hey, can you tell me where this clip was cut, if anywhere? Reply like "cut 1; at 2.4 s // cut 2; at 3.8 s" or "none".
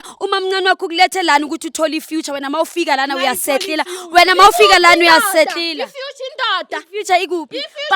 none